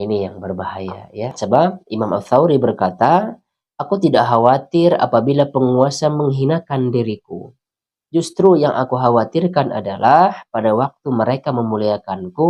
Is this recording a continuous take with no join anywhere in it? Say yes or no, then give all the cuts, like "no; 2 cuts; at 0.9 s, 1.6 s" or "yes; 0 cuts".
no; 1 cut; at 1.4 s